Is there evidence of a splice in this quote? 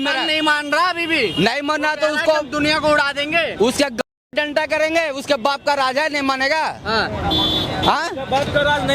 no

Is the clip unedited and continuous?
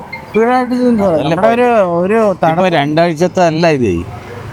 yes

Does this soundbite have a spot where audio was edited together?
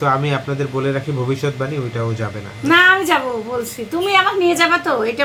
no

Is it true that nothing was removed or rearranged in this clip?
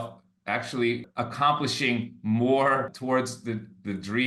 no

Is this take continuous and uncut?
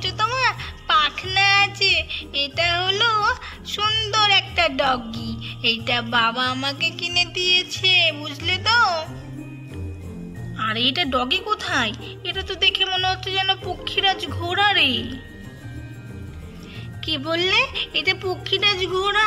yes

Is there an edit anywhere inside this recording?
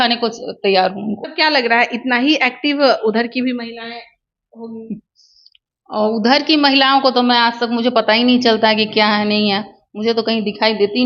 yes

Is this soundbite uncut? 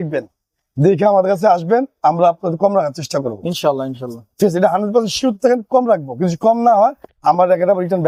yes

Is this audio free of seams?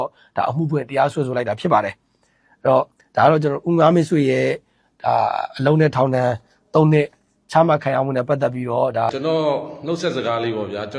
no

